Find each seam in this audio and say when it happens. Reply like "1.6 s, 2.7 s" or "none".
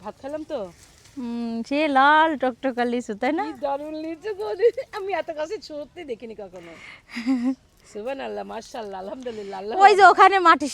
none